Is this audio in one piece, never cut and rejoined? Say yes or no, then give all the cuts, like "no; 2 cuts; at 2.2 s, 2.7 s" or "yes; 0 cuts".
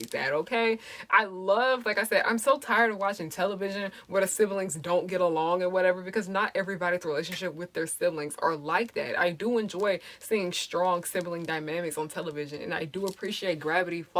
yes; 0 cuts